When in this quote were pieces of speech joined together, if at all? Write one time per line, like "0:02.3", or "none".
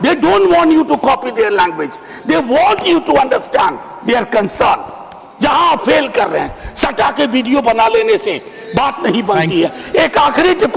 none